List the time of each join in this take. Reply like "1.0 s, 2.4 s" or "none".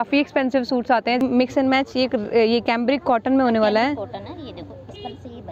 1.2 s